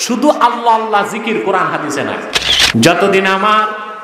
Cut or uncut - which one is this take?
cut